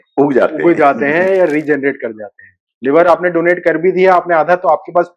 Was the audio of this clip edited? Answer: yes; 1 cut; at 2.7 s

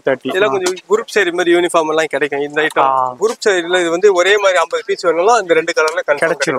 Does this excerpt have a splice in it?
yes; 1 cut; at 3.2 s

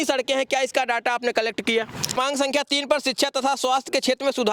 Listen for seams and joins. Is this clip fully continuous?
no; 1 cut; at 2.2 s

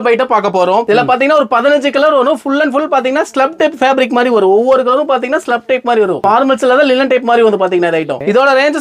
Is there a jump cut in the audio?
no; 0 cuts

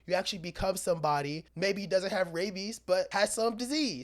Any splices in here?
yes; 2 cuts; at 1.4 s, 3.1 s

